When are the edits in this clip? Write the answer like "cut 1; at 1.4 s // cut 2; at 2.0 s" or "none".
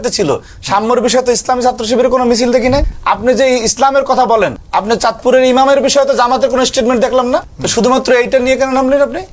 cut 1; at 2.9 s // cut 2; at 4.6 s // cut 3; at 7.6 s